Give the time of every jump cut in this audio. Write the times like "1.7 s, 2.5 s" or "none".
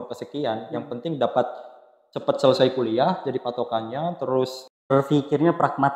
4.9 s